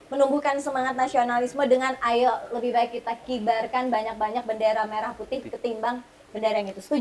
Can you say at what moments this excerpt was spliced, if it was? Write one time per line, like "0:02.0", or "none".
none